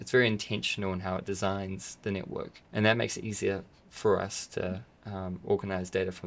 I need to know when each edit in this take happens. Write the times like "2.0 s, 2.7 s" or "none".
2.6 s